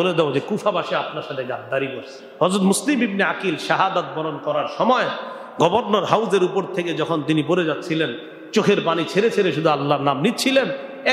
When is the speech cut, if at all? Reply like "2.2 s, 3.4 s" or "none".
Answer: 2.2 s